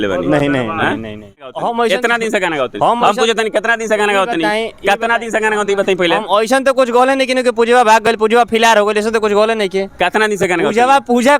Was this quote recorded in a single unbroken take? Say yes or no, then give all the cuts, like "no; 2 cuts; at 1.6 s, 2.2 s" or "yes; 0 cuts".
no; 1 cut; at 1.4 s